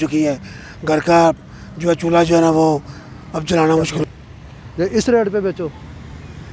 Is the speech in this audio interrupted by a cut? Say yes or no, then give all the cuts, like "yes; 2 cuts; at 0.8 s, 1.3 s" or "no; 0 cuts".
yes; 1 cut; at 4.0 s